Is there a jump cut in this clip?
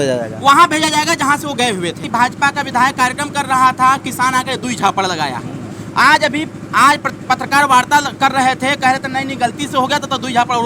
yes; 1 cut; at 2.0 s

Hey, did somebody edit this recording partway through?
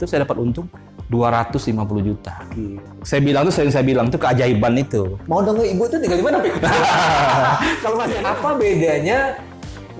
yes; 3 cuts; at 2.8 s, 5.2 s, 8.1 s

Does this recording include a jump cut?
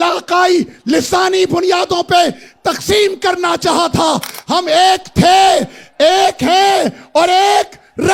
no; 0 cuts

